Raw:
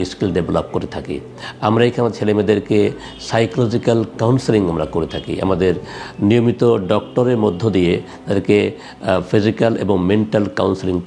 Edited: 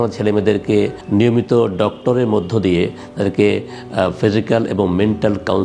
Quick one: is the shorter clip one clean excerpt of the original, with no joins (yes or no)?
no